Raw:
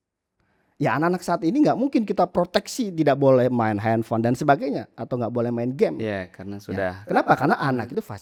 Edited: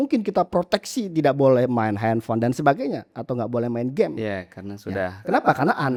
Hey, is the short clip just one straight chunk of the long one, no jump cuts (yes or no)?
yes